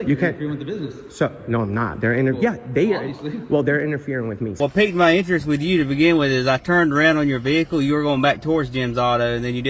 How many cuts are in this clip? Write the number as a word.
two